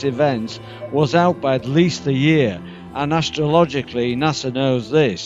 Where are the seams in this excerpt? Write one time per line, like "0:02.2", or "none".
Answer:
none

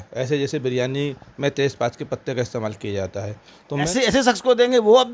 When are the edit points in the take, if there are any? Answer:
0:03.9

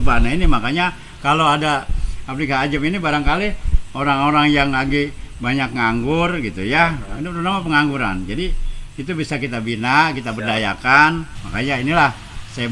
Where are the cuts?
0:11.4

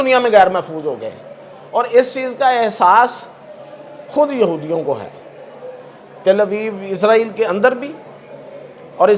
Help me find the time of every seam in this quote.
none

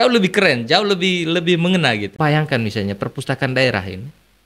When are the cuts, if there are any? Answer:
0:02.2

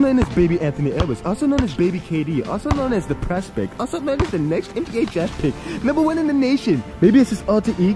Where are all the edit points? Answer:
0:06.9

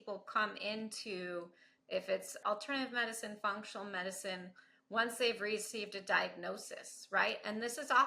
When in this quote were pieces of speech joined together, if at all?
0:02.4

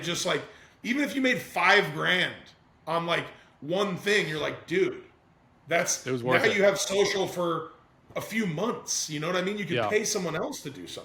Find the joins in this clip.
none

